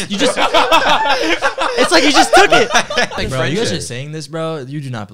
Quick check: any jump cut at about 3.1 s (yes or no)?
yes